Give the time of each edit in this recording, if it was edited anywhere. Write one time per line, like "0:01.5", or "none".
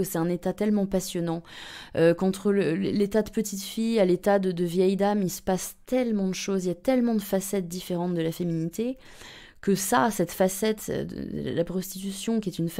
none